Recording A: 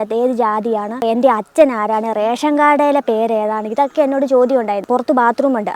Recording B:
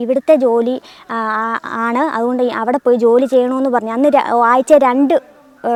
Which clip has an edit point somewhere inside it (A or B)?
A